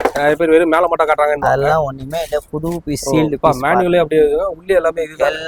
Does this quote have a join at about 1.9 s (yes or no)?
no